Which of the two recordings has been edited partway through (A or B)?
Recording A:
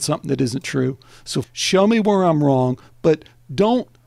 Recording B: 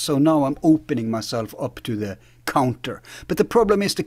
A